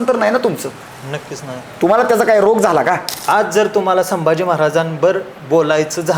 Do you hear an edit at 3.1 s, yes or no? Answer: yes